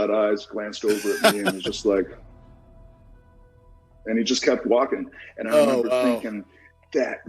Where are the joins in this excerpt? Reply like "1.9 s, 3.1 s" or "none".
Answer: none

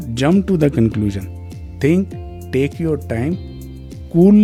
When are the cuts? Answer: none

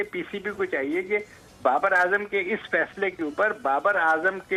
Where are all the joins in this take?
none

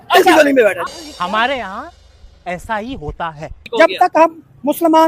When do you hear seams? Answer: 3.5 s

